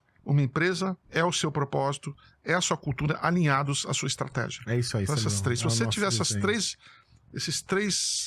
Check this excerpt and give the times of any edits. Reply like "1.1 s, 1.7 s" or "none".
1.0 s